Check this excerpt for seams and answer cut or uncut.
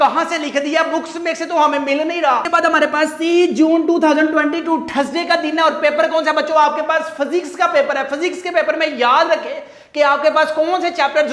uncut